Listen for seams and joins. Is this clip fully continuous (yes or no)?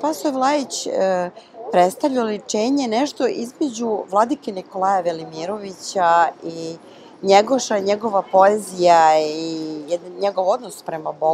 yes